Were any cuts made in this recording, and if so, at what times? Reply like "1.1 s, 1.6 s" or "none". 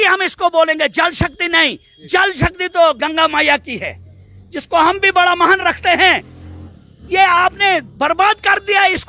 none